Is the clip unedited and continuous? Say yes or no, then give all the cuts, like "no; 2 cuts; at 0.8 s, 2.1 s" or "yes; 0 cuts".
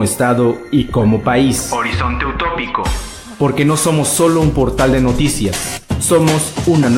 yes; 0 cuts